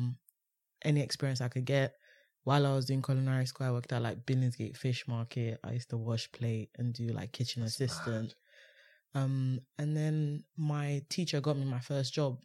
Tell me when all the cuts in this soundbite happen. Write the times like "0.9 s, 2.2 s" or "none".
none